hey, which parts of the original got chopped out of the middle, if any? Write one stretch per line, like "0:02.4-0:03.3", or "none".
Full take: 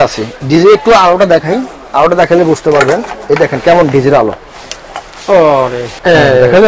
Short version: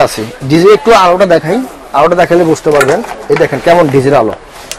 none